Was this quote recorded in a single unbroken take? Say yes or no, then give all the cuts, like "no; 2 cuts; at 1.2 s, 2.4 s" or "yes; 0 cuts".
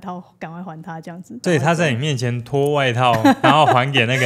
no; 1 cut; at 1.4 s